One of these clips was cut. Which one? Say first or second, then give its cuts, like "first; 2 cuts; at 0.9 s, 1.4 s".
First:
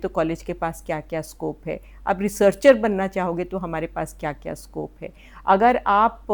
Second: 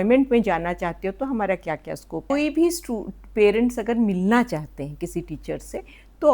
second; 1 cut; at 2.3 s